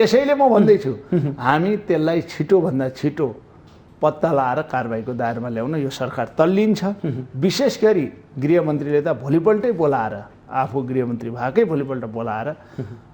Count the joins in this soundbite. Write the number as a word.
zero